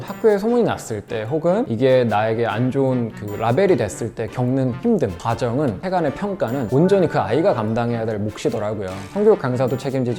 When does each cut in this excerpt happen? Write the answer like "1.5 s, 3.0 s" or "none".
none